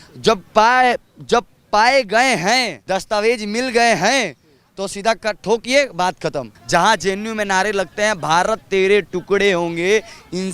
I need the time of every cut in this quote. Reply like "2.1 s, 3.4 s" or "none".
2.8 s, 6.5 s